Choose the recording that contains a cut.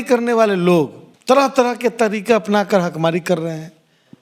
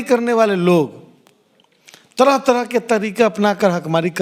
first; 1 cut; at 1.0 s

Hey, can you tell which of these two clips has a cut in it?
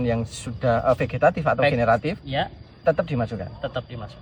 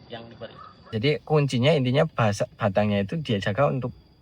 second; 1 cut; at 0.9 s

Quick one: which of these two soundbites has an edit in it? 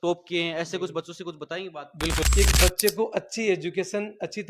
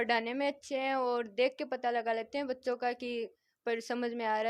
first; 1 cut; at 2.3 s

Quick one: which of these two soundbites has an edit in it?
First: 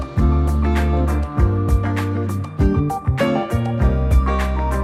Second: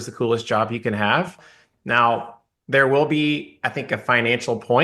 second; 1 cut; at 1.4 s

